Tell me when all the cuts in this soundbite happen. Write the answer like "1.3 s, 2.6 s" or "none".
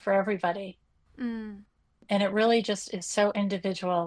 none